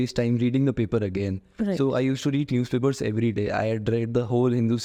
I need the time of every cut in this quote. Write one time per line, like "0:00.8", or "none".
none